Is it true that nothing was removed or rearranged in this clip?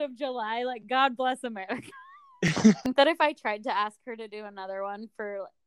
no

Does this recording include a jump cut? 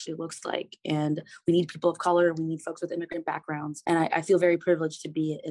yes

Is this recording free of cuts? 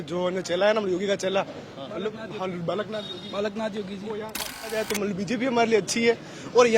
no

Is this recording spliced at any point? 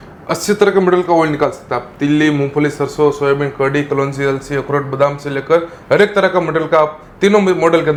no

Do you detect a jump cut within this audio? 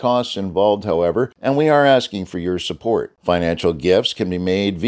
yes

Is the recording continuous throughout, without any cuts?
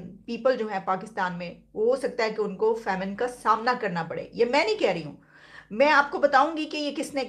yes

